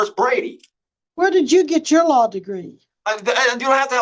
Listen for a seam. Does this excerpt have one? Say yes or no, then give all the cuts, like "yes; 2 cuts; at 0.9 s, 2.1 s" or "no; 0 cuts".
no; 0 cuts